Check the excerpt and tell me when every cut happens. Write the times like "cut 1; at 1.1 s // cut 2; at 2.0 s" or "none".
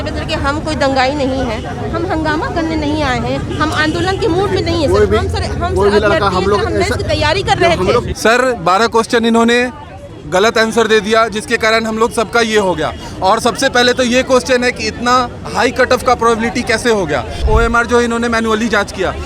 cut 1; at 8.1 s // cut 2; at 17.4 s